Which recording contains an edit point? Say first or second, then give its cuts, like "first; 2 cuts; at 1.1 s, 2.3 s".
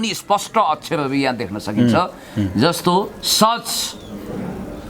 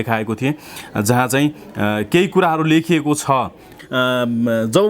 second; 1 cut; at 3.7 s